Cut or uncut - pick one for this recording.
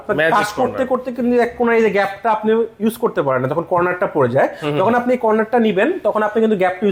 uncut